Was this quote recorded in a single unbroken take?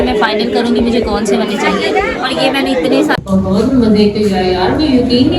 no; 1 cut; at 3.2 s

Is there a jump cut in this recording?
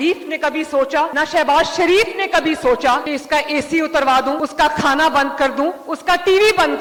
no; 0 cuts

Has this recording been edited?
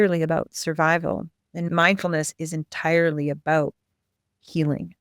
yes; 1 cut; at 1.7 s

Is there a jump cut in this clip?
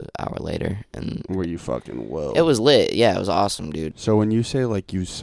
yes; 1 cut; at 3.9 s

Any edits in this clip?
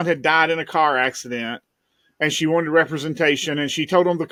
no; 0 cuts

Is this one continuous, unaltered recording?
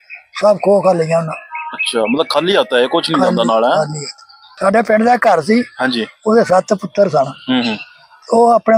no; 1 cut; at 4.4 s

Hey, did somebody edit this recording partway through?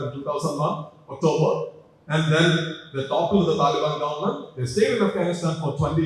no; 0 cuts

